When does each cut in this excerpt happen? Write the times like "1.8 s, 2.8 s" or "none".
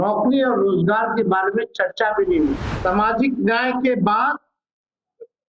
2.7 s

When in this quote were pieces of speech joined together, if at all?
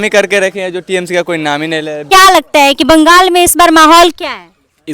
2.0 s

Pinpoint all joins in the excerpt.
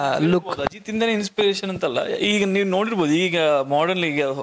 none

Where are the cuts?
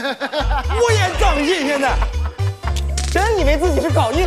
none

